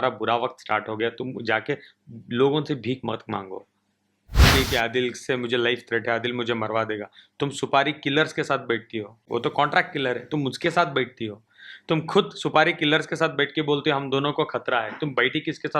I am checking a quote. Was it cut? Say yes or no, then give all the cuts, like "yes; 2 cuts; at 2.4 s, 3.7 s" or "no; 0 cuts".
yes; 2 cuts; at 4.5 s, 9.2 s